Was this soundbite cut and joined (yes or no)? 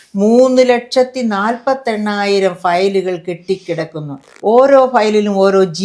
yes